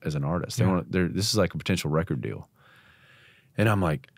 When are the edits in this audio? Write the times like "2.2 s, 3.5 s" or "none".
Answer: none